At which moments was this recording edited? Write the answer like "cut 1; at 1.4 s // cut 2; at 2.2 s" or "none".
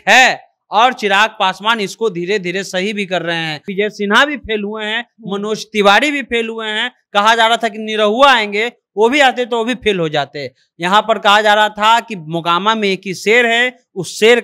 cut 1; at 3.7 s